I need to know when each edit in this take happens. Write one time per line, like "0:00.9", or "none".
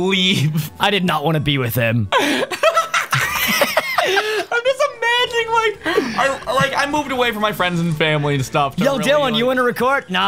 none